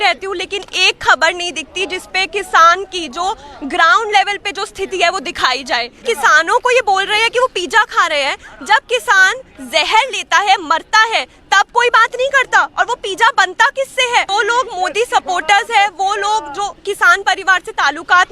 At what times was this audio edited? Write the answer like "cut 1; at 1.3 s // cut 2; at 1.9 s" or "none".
cut 1; at 6.0 s // cut 2; at 14.3 s